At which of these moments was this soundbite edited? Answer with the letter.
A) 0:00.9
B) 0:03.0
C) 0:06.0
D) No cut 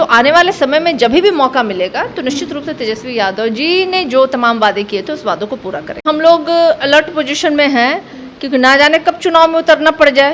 C